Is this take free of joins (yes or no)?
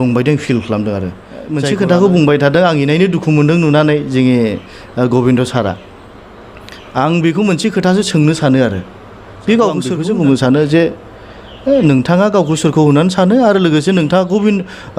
no